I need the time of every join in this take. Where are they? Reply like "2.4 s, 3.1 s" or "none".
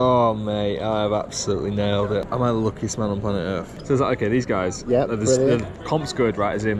2.3 s, 3.7 s